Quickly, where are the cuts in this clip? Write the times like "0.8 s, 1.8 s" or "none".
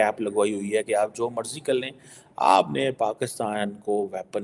none